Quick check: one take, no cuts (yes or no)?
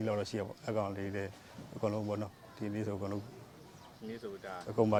yes